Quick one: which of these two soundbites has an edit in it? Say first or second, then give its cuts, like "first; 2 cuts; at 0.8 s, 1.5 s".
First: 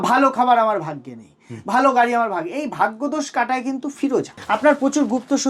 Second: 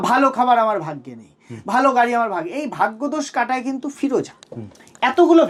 first; 1 cut; at 4.4 s